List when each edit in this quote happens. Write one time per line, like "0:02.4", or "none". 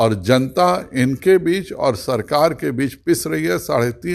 none